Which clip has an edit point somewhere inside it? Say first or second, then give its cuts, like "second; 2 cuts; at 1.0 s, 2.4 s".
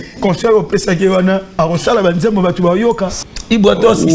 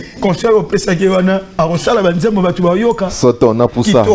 first; 1 cut; at 3.1 s